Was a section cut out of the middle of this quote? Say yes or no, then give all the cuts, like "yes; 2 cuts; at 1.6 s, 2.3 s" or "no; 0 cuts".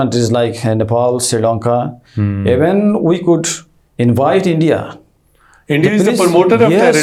no; 0 cuts